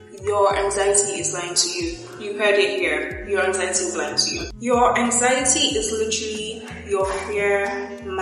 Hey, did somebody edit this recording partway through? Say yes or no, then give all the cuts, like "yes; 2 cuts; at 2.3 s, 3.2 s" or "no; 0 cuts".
no; 0 cuts